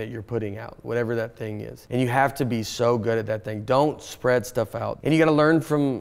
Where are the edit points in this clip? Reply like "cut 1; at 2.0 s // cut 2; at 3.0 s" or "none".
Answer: cut 1; at 1.7 s // cut 2; at 4.9 s